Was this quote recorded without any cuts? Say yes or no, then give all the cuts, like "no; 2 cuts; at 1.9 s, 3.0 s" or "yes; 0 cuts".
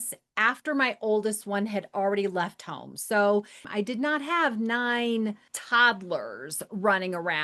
no; 2 cuts; at 3.6 s, 5.5 s